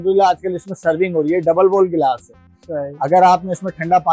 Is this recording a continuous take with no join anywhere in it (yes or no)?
yes